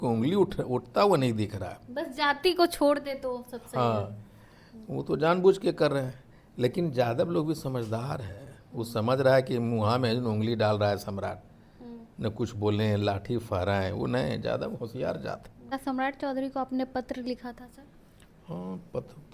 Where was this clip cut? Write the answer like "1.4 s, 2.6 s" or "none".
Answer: 15.7 s